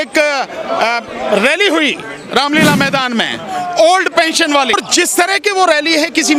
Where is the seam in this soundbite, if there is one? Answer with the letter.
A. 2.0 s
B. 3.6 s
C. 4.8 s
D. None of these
C